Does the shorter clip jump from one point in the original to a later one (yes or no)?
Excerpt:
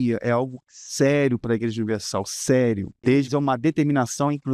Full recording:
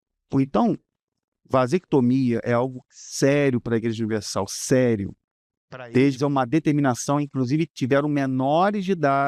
yes